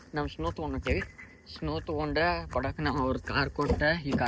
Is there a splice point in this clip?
no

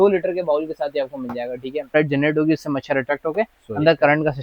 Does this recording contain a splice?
yes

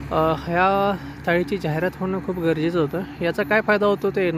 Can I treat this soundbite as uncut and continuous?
yes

